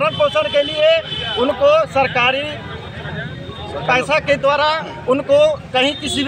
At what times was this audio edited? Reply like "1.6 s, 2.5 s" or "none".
none